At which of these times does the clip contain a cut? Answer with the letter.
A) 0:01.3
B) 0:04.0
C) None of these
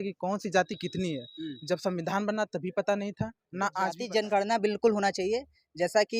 B